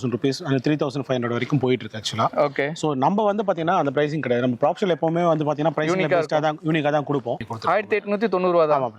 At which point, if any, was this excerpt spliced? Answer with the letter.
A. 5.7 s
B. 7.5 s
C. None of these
B